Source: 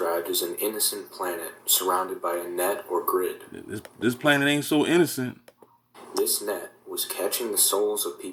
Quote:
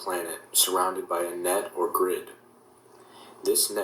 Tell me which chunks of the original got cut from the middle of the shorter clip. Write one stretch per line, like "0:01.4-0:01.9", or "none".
0:03.8-0:05.4